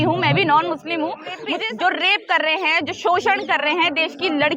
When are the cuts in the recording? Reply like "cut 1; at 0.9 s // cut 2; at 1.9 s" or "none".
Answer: cut 1; at 1.5 s